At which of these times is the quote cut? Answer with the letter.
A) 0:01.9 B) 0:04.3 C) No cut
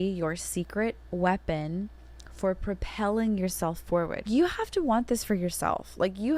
B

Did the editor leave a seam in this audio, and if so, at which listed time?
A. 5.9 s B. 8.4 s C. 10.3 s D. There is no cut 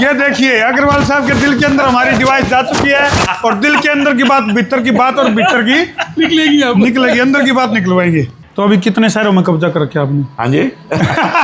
B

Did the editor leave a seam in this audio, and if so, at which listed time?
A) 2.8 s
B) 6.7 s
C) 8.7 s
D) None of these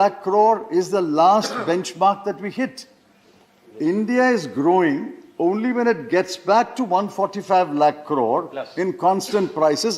D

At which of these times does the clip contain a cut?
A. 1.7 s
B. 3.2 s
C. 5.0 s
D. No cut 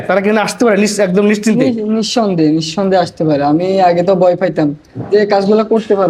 D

